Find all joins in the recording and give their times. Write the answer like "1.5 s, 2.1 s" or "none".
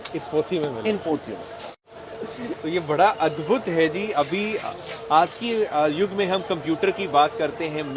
1.8 s